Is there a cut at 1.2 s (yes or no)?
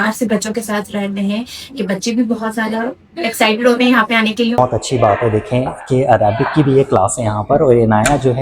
no